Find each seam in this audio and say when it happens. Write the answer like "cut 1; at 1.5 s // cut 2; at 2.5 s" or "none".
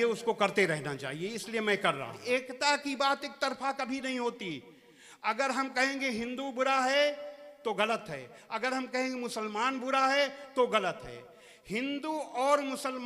cut 1; at 2.1 s